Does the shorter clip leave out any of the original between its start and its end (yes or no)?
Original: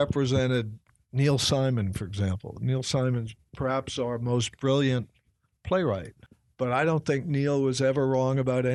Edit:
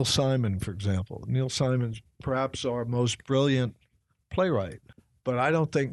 no